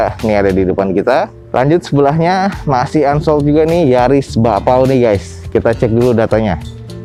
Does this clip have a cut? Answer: no; 0 cuts

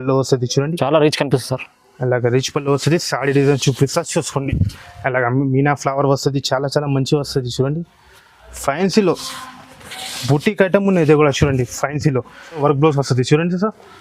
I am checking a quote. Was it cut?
yes; 1 cut; at 12.6 s

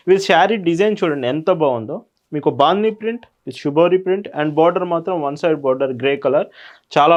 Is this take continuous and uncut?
yes; 0 cuts

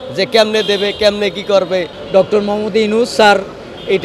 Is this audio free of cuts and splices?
no; 1 cut; at 2.0 s

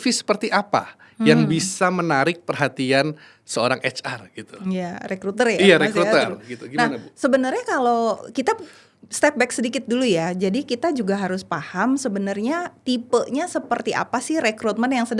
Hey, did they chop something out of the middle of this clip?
no; 0 cuts

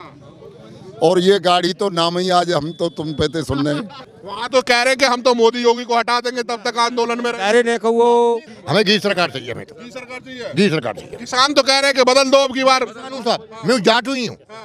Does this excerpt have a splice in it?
yes; 2 cuts; at 4.0 s, 8.5 s

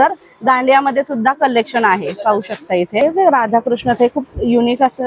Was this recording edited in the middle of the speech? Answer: yes; 1 cut; at 3.0 s

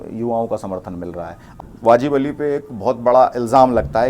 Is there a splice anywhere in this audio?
yes; 1 cut; at 1.5 s

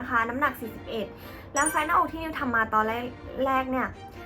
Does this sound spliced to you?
no; 0 cuts

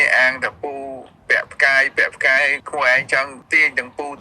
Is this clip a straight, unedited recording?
no; 1 cut; at 2.6 s

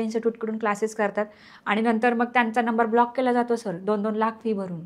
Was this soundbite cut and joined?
no; 0 cuts

